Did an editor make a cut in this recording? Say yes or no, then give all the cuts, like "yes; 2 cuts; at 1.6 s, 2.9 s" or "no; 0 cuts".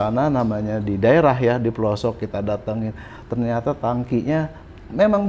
no; 0 cuts